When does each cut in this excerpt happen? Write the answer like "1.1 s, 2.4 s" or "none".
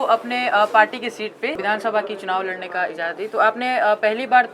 1.6 s